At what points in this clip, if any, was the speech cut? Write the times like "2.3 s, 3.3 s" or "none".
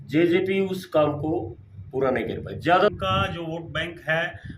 2.9 s